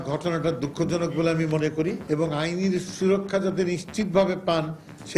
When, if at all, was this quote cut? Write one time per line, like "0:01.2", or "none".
0:02.0